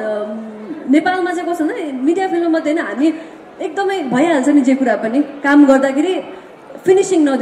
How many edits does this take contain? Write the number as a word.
zero